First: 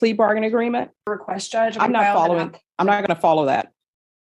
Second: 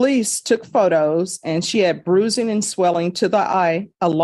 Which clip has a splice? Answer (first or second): first